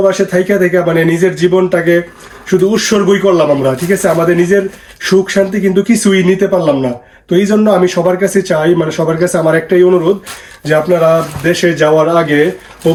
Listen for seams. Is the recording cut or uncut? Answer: uncut